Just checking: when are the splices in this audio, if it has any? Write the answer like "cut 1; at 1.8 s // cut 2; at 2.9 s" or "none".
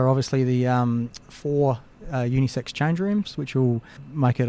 none